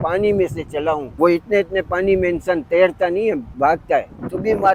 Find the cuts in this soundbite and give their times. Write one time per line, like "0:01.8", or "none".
0:01.1
0:03.8